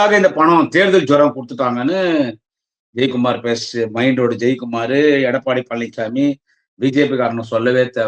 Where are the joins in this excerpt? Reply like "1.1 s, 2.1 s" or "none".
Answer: none